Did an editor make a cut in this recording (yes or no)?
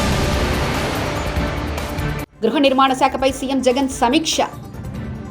no